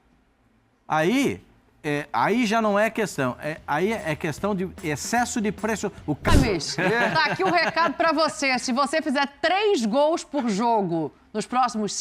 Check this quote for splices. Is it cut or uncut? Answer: cut